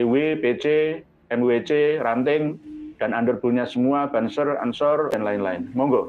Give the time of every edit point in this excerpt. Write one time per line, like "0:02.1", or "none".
0:05.2